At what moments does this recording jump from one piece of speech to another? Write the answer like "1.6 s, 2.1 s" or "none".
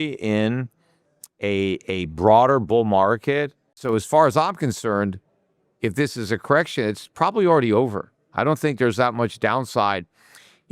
3.7 s